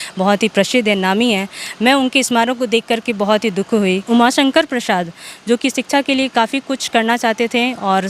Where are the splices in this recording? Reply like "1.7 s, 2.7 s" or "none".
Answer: 4.0 s